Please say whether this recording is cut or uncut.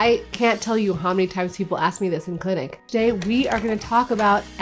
cut